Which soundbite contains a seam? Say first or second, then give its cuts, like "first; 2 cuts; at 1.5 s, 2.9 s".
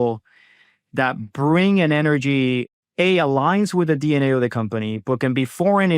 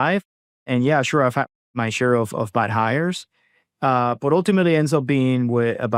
first; 1 cut; at 2.7 s